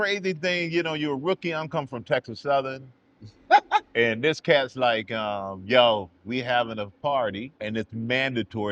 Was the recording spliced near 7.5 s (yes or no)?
yes